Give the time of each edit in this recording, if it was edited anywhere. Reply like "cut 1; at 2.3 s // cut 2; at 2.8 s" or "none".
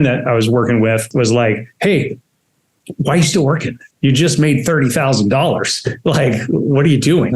cut 1; at 1.1 s